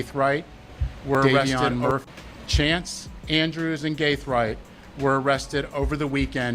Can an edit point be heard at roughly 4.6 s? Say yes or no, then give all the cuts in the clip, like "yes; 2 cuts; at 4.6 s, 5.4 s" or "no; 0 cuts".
no; 1 cut; at 2.0 s